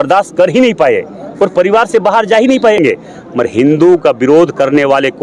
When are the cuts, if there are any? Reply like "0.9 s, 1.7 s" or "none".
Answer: 2.8 s